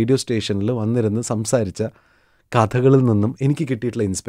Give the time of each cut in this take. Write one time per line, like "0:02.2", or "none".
none